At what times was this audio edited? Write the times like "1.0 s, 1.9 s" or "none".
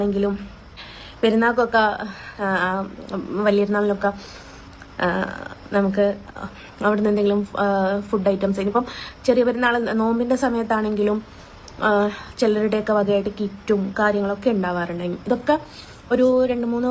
none